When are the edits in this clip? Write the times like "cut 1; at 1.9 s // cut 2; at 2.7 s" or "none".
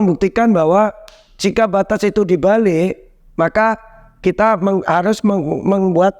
none

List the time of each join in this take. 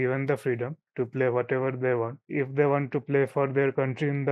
cut 1; at 2.2 s

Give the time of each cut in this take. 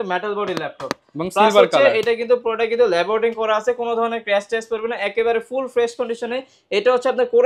none

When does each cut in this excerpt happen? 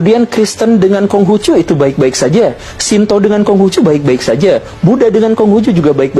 cut 1; at 2.7 s

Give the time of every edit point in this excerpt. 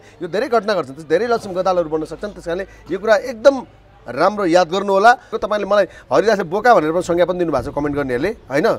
cut 1; at 5.3 s

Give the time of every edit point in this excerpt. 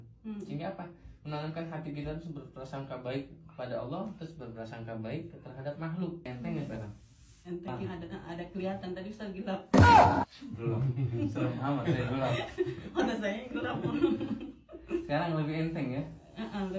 cut 1; at 6.3 s

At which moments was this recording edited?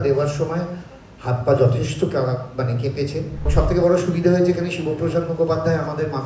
cut 1; at 3.5 s

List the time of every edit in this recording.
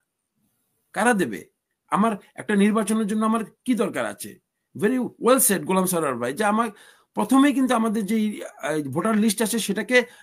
none

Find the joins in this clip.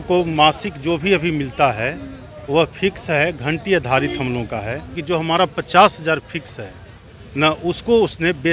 cut 1; at 4.9 s

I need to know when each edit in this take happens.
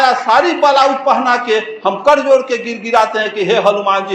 none

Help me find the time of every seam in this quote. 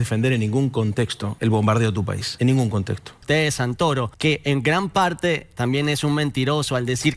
cut 1; at 1.2 s // cut 2; at 2.2 s // cut 3; at 3.2 s // cut 4; at 4.1 s

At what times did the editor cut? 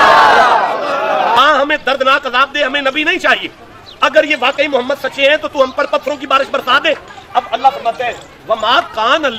cut 1; at 1.4 s

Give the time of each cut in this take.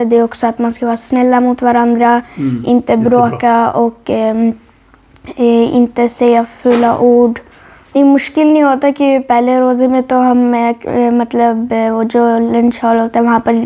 cut 1; at 8.0 s

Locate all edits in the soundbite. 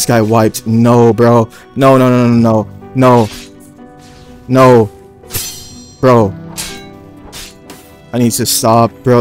none

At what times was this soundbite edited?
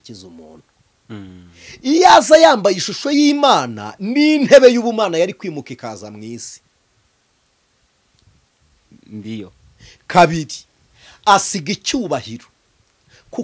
none

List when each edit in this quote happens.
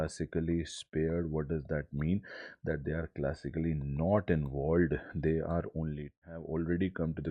cut 1; at 6.2 s

